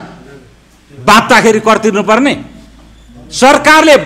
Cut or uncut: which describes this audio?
uncut